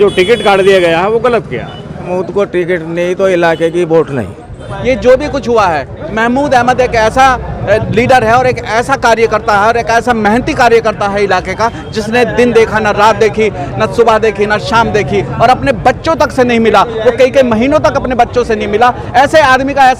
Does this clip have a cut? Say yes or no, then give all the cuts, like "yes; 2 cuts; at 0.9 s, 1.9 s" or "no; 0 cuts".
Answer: yes; 2 cuts; at 2.0 s, 4.7 s